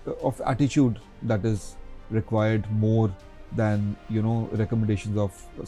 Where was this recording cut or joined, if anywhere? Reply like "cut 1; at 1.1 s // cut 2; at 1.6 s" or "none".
none